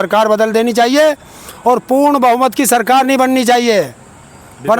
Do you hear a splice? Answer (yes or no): no